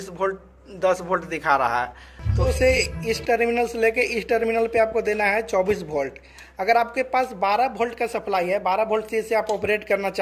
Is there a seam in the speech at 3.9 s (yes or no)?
no